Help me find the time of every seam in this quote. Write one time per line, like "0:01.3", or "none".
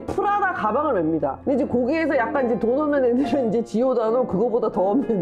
none

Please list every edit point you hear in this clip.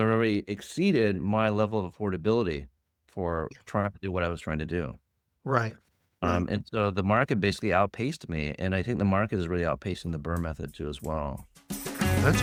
none

